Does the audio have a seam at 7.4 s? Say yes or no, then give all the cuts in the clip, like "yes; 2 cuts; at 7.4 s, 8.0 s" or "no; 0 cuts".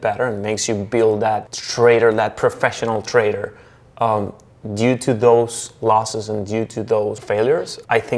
yes; 2 cuts; at 1.6 s, 7.4 s